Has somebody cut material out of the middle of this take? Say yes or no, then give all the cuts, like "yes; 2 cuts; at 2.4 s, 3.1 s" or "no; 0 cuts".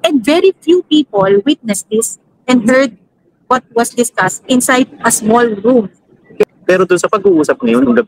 yes; 1 cut; at 6.4 s